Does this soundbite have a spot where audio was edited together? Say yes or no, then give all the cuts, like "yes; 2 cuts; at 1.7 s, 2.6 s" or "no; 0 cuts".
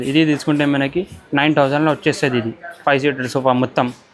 no; 0 cuts